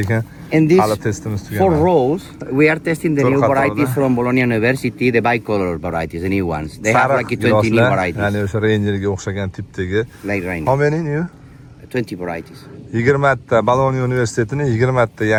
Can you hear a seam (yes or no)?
no